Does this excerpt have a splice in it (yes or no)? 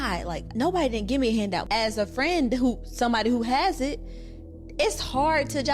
yes